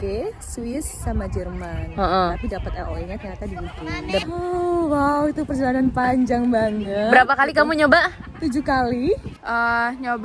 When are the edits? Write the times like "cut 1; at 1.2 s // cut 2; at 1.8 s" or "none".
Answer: cut 1; at 4.2 s // cut 2; at 9.3 s